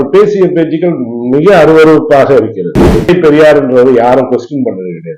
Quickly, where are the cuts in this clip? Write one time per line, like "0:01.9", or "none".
0:02.8